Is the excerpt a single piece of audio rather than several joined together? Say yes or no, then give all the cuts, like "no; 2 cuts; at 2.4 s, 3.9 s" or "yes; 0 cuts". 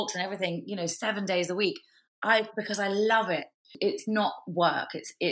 no; 1 cut; at 3.7 s